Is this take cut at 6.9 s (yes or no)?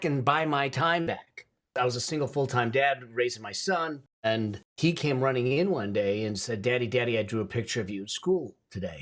no